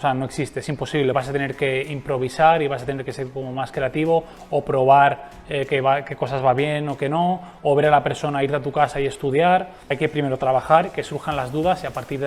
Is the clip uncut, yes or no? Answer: no